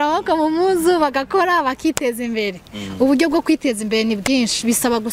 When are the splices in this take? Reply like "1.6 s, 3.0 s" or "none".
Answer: none